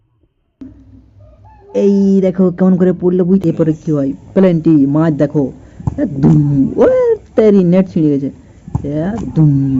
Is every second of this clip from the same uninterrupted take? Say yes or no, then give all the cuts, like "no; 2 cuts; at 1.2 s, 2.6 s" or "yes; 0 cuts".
no; 1 cut; at 3.4 s